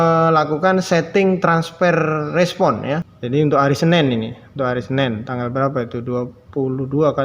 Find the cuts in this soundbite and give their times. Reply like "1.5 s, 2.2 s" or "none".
3.1 s